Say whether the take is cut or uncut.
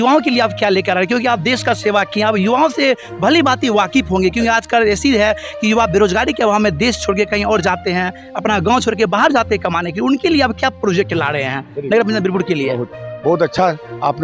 uncut